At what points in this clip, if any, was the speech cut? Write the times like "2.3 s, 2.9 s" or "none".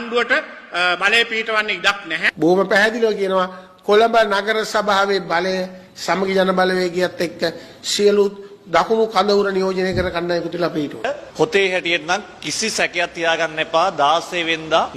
none